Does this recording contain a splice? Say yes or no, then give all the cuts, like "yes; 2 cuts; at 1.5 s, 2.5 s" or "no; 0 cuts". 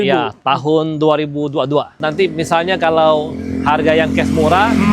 yes; 1 cut; at 1.9 s